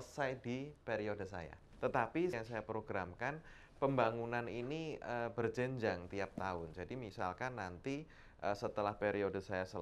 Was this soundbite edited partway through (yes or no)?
yes